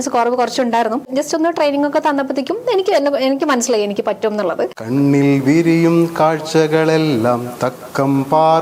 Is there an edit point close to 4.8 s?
yes; 2 cuts; at 1.1 s, 4.8 s

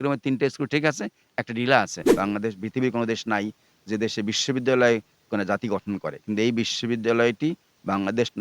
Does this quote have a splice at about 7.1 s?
no; 1 cut; at 2.0 s

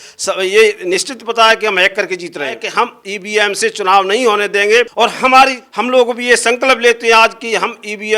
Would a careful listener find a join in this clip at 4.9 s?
yes; 3 cuts; at 2.6 s, 4.9 s, 5.7 s

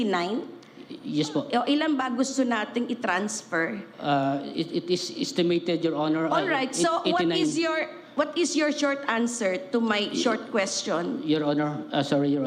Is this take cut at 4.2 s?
no; 0 cuts

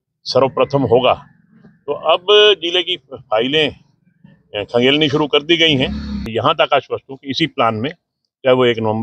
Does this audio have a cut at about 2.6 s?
no; 1 cut; at 6.3 s

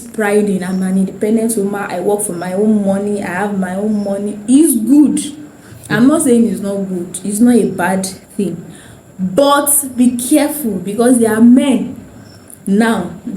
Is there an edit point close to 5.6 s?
no; 0 cuts

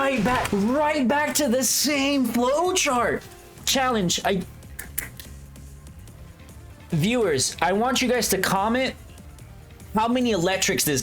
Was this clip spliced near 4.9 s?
no; 1 cut; at 3.6 s

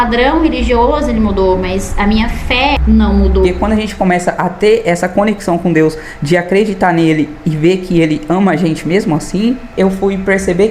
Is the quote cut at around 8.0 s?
no; 3 cuts; at 2.8 s, 3.5 s, 9.7 s

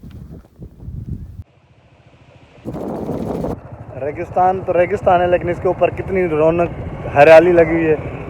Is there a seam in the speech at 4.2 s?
no; 1 cut; at 1.6 s

